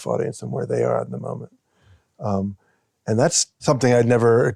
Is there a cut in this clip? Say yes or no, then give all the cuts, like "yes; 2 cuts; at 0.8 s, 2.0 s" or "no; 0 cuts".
yes; 1 cut; at 3.6 s